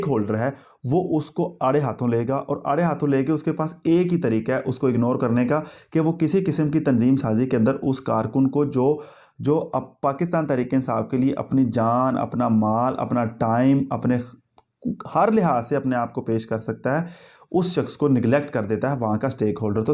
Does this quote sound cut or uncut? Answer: uncut